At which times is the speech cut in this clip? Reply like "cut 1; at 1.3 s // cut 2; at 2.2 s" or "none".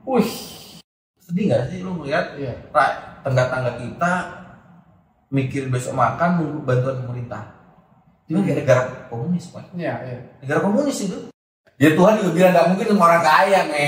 cut 1; at 0.9 s // cut 2; at 11.6 s